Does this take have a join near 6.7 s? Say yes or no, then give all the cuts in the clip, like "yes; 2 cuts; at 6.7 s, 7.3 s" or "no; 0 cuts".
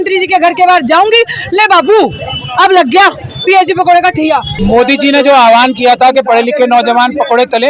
no; 1 cut; at 4.5 s